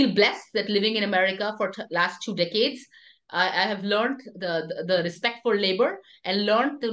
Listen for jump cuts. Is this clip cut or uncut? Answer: uncut